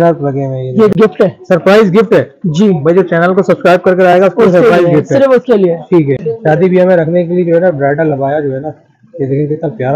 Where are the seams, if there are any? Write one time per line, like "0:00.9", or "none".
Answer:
0:00.9
0:06.2